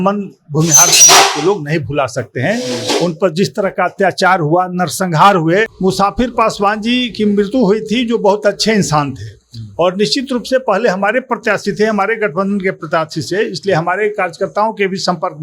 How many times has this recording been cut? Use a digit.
1